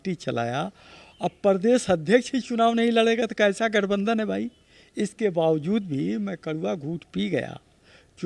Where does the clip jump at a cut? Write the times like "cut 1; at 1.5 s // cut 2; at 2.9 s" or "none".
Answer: none